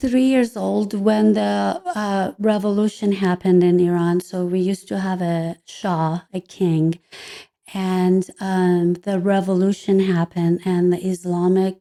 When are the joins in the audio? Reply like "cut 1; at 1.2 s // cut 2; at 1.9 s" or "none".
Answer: none

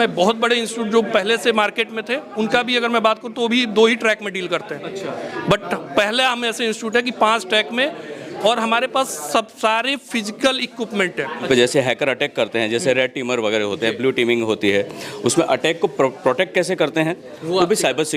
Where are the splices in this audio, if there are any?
cut 1; at 11.5 s

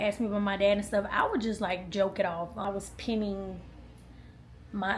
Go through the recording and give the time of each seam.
cut 1; at 2.6 s

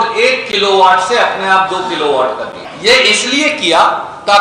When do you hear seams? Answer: cut 1; at 2.6 s

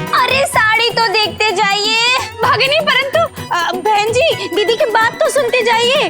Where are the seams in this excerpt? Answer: none

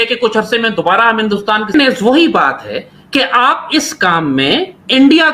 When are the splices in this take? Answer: cut 1; at 1.6 s

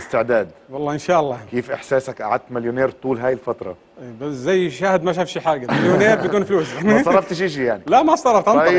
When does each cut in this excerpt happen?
cut 1; at 3.2 s

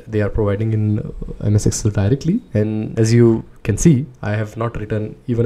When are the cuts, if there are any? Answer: none

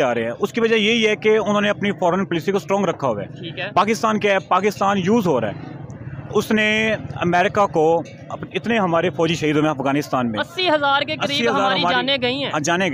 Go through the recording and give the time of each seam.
none

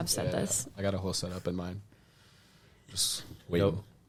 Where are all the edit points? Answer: none

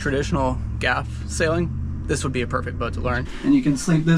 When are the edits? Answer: cut 1; at 3.3 s

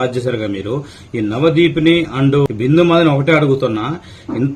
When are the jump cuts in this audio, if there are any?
cut 1; at 2.4 s

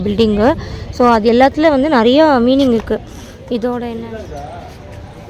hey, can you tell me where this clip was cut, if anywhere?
cut 1; at 4.0 s

